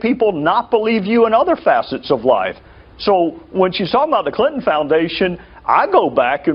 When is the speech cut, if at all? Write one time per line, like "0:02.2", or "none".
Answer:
0:02.5